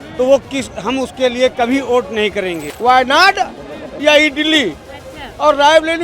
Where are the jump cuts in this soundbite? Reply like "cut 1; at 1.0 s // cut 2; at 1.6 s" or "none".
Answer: cut 1; at 2.7 s